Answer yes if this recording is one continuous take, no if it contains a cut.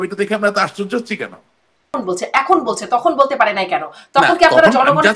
no